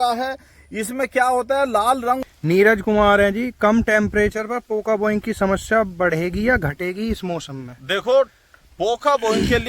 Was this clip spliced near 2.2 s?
yes; 1 cut; at 2.2 s

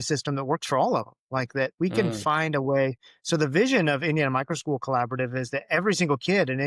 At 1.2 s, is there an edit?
no; 0 cuts

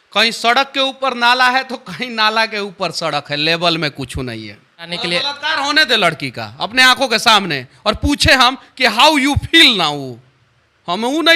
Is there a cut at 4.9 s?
yes; 1 cut; at 4.9 s

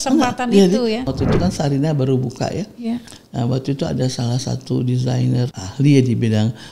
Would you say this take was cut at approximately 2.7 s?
no; 2 cuts; at 1.1 s, 5.6 s

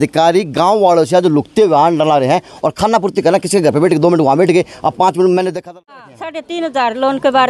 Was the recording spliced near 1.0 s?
no; 1 cut; at 5.6 s

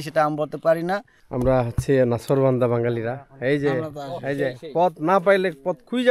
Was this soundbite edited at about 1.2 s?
yes; 1 cut; at 1.2 s

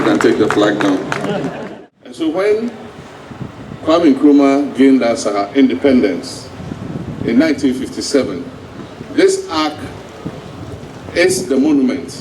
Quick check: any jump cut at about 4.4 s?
no; 1 cut; at 1.6 s

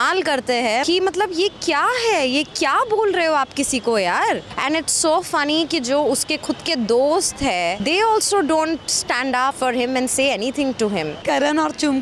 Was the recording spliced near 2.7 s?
no; 5 cuts; at 0.8 s, 4.5 s, 7.8 s, 9.6 s, 11.2 s

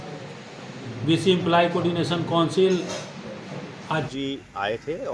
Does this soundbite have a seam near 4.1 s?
yes; 1 cut; at 4.1 s

